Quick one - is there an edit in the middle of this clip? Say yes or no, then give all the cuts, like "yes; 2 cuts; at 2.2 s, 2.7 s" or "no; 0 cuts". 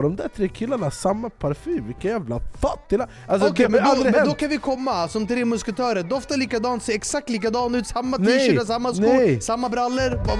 no; 0 cuts